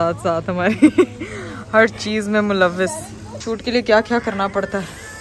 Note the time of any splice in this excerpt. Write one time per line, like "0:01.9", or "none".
0:03.4